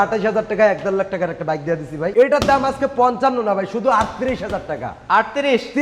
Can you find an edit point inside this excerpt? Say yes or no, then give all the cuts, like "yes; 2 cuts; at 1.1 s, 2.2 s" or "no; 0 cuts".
yes; 1 cut; at 2.0 s